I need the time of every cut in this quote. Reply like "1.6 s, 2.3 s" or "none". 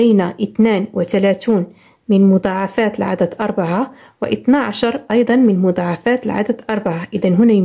none